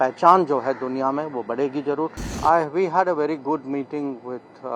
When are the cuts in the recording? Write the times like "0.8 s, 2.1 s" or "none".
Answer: 2.4 s